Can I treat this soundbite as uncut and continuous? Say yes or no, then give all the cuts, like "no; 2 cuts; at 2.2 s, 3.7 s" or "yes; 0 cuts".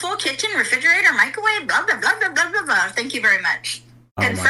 yes; 0 cuts